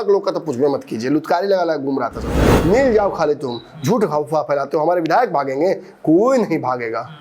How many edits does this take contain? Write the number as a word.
one